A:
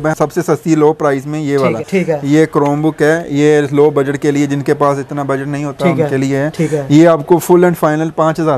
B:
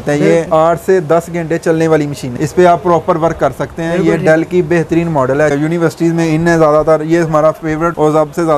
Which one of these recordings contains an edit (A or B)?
B